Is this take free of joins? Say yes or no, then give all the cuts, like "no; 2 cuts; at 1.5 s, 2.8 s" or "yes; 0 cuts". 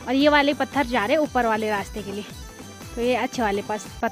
yes; 0 cuts